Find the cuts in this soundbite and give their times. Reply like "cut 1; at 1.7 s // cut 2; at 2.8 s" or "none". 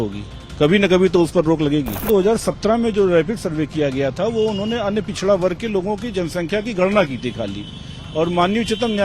cut 1; at 2.0 s